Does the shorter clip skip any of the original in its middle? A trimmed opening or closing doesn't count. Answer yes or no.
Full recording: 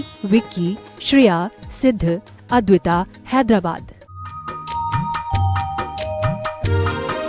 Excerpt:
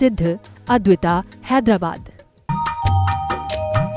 yes